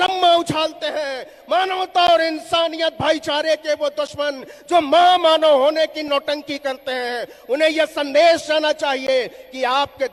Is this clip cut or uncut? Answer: uncut